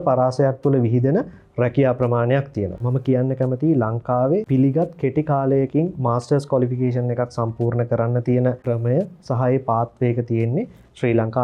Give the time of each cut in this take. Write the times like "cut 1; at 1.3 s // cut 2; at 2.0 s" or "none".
cut 1; at 2.9 s // cut 2; at 4.5 s // cut 3; at 8.6 s